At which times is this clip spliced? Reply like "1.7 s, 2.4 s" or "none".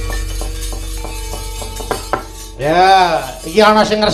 none